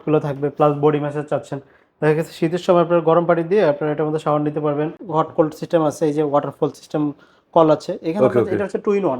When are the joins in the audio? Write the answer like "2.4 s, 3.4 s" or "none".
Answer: 5.0 s